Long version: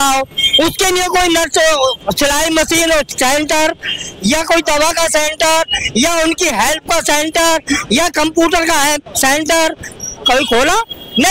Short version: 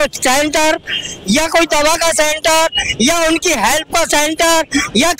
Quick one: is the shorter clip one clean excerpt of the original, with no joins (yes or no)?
yes